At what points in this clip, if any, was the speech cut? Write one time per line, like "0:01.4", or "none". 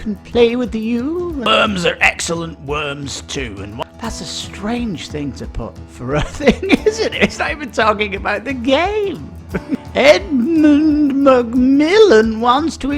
0:01.5
0:03.8
0:09.9